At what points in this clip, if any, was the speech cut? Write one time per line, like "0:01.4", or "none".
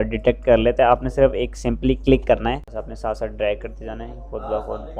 0:02.6